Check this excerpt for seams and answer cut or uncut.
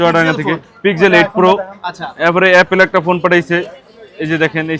uncut